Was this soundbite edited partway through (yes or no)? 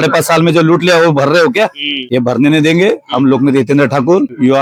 no